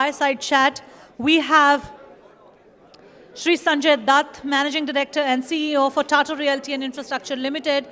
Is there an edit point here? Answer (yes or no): no